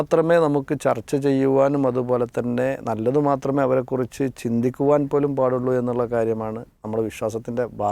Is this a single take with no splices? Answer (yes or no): yes